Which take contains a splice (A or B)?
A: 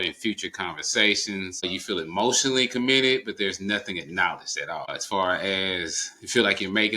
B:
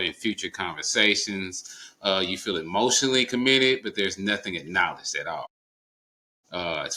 A